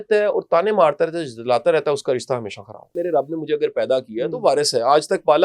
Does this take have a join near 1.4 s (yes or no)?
no